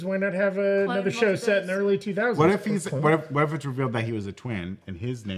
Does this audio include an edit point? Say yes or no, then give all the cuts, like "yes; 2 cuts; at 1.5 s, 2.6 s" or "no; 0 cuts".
no; 0 cuts